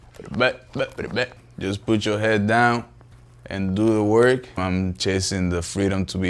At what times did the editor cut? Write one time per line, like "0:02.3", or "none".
0:01.4
0:04.6